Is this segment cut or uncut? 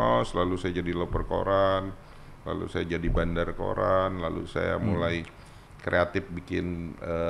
uncut